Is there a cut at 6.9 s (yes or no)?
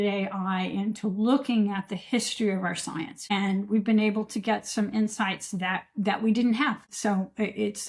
yes